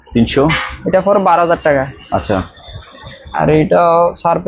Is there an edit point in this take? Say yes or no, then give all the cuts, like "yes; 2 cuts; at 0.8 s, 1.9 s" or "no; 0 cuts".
no; 0 cuts